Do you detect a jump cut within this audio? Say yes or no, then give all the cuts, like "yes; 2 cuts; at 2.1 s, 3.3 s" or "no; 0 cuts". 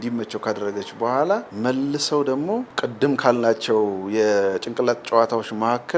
yes; 2 cuts; at 1.5 s, 2.7 s